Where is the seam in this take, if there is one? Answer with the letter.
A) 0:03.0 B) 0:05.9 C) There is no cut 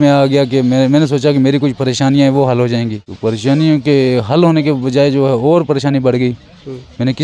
A